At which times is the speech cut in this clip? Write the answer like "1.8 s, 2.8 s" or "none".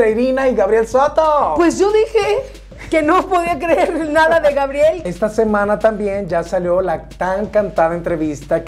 5.0 s